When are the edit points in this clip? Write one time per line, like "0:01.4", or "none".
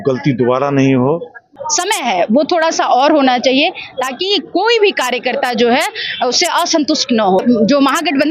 0:01.5
0:07.4